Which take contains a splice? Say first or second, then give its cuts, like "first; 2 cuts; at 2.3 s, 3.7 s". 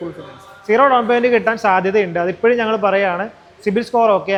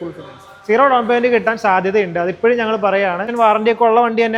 second; 1 cut; at 3.3 s